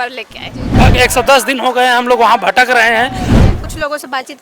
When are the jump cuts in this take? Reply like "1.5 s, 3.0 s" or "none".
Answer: 0.8 s, 3.3 s